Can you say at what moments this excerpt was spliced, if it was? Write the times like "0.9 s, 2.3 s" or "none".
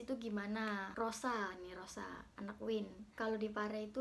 0.9 s, 3.1 s